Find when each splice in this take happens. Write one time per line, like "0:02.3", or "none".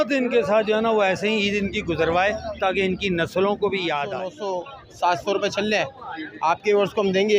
0:04.4